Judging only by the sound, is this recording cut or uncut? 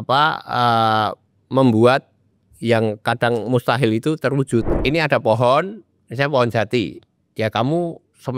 cut